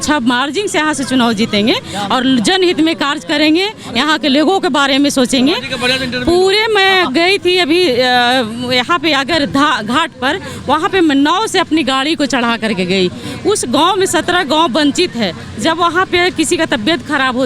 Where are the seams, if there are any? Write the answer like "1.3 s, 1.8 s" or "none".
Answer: none